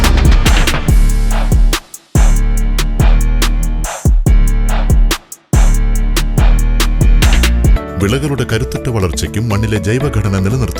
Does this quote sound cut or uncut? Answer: cut